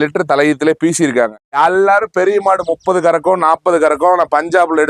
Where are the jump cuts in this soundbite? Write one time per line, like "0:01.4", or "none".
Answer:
0:01.4